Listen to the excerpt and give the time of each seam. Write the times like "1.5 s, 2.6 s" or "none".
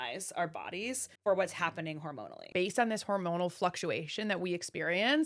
1.1 s, 2.5 s